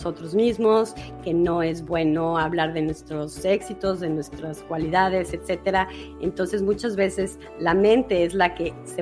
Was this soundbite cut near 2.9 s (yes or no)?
no